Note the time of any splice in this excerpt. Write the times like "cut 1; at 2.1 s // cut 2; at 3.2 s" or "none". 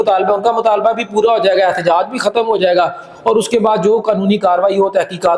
none